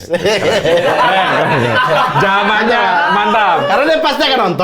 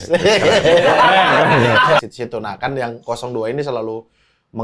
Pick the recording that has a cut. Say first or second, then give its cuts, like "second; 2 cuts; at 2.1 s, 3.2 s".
second; 1 cut; at 2.0 s